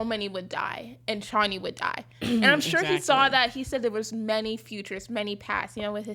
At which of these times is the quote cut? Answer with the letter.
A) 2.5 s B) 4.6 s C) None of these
C